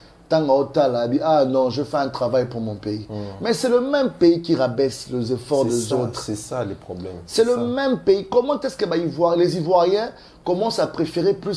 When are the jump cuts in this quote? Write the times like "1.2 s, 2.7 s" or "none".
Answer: none